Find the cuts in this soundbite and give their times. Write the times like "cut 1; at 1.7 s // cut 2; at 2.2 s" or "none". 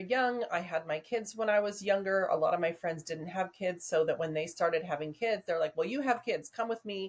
none